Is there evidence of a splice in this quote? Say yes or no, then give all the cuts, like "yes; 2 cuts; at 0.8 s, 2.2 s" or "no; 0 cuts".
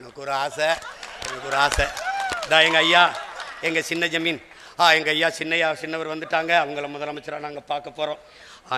no; 0 cuts